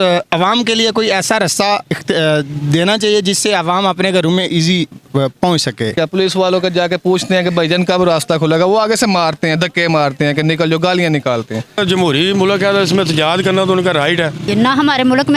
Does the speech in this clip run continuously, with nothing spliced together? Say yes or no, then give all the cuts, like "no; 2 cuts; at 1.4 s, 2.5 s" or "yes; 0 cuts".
no; 3 cuts; at 5.9 s, 11.8 s, 14.5 s